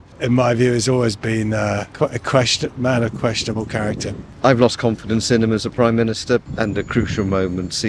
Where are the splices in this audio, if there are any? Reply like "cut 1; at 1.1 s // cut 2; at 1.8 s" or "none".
cut 1; at 4.3 s // cut 2; at 6.5 s